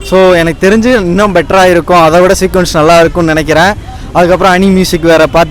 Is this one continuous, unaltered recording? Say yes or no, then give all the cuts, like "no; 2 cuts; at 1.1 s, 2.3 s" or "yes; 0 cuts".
yes; 0 cuts